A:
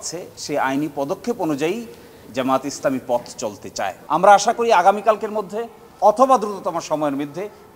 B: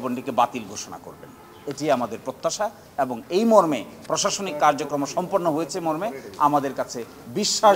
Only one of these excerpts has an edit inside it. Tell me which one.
A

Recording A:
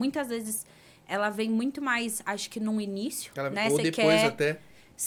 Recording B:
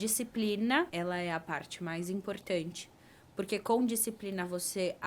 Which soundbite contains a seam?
B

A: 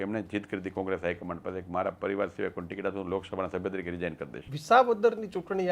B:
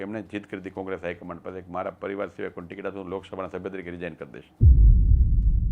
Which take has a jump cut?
A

